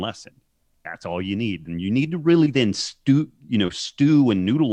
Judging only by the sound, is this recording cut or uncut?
uncut